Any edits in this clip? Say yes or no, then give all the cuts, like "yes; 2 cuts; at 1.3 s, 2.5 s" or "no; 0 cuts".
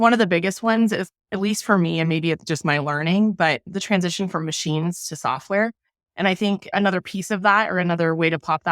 yes; 3 cuts; at 1.2 s, 3.6 s, 6.7 s